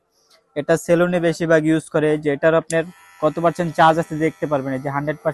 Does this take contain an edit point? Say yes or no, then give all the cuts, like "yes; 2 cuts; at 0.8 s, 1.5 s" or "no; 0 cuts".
no; 0 cuts